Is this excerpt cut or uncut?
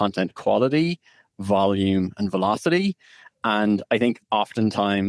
uncut